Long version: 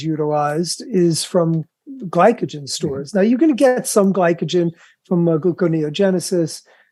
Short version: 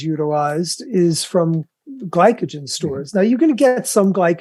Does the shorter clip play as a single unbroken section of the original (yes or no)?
yes